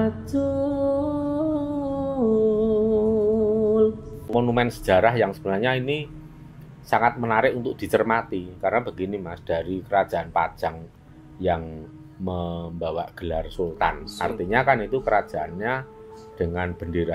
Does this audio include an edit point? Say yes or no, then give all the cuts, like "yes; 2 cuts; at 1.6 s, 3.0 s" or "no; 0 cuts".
yes; 1 cut; at 4.3 s